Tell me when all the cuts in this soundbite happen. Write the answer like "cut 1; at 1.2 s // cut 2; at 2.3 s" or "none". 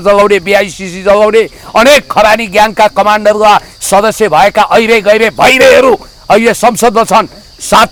none